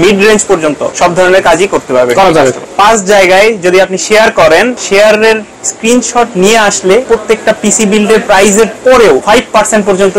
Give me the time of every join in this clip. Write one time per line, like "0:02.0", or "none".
0:00.9
0:02.7
0:04.8
0:07.0
0:09.2